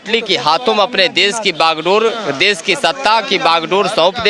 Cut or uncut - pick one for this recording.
uncut